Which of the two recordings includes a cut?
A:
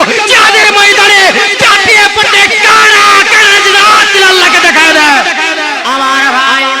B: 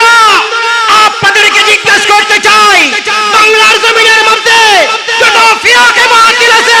A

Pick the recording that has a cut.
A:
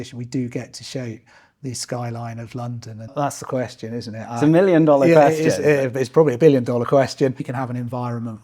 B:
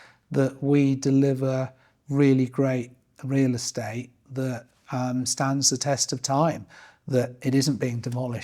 A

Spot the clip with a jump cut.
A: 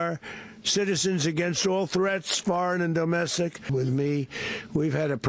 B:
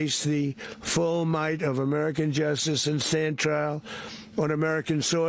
A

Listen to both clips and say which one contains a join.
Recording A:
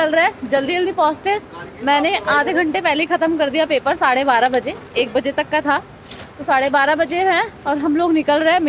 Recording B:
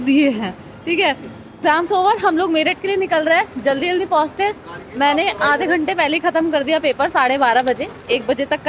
B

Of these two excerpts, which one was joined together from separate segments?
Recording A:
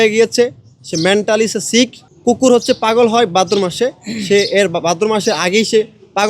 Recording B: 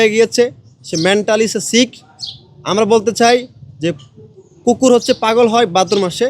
A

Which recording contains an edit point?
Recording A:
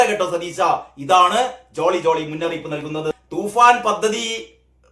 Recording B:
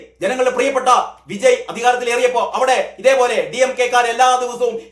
A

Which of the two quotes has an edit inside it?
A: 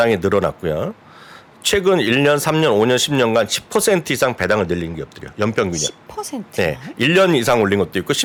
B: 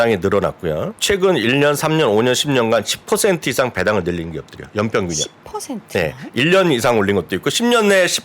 B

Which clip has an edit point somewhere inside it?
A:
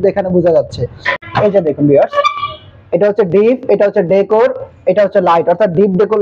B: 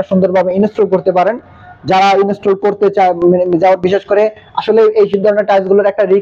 A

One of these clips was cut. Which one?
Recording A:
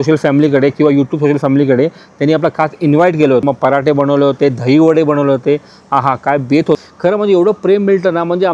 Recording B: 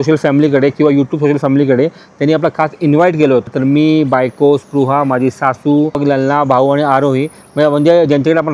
A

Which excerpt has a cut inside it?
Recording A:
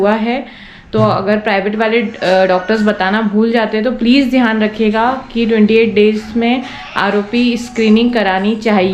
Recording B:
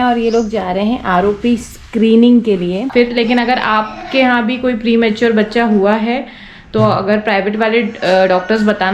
B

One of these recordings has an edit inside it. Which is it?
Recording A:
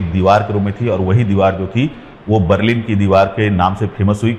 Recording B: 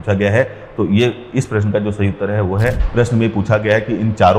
B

